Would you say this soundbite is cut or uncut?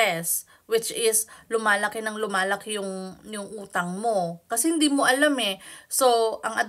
uncut